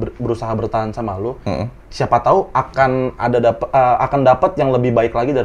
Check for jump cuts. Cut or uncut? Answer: uncut